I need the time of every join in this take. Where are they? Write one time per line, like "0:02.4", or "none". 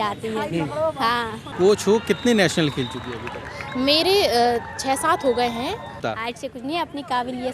0:01.4
0:06.0